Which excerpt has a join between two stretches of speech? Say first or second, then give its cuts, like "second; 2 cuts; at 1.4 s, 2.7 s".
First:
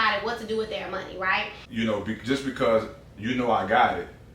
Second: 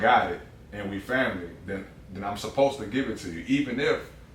first; 1 cut; at 1.6 s